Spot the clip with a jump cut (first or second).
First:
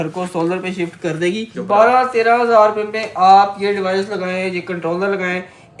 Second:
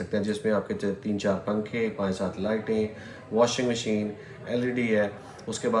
first